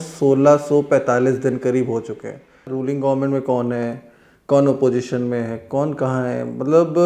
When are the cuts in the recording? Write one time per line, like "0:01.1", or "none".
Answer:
0:02.7